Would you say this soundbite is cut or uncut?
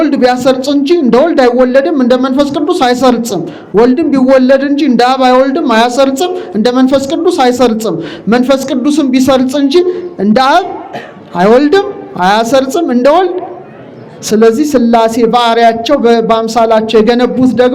uncut